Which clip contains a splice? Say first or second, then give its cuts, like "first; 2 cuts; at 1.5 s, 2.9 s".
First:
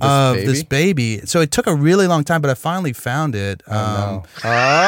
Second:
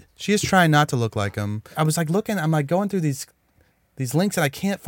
second; 1 cut; at 1.7 s